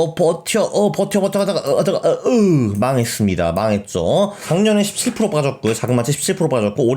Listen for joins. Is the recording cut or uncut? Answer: cut